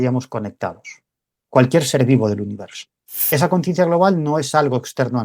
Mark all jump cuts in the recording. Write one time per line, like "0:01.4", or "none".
0:03.2